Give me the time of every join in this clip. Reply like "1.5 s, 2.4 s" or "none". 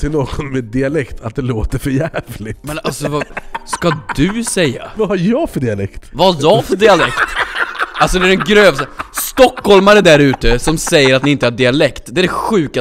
4.8 s, 6.0 s